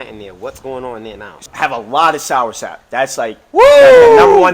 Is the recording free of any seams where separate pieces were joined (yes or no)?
no